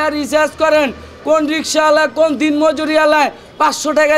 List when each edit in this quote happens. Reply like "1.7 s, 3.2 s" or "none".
none

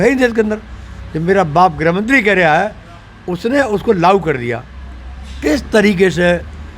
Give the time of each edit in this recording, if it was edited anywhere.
none

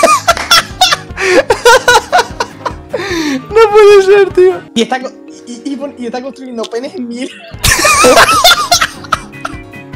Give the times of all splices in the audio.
none

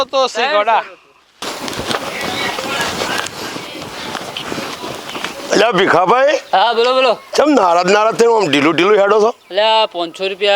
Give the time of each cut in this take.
1.3 s

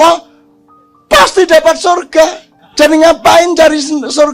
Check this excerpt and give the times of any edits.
2.5 s

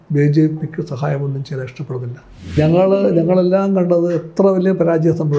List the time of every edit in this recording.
2.6 s

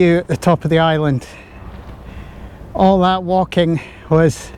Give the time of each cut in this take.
none

